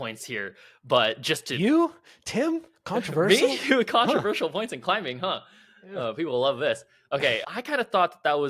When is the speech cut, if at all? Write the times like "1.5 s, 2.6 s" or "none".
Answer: 7.4 s

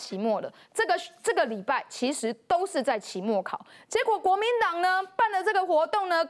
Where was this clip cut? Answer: none

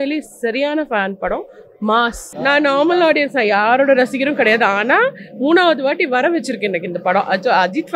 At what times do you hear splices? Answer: 2.2 s

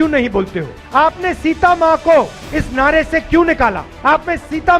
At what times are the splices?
none

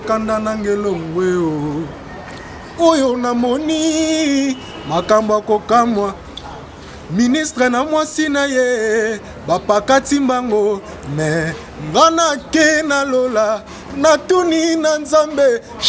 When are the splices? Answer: none

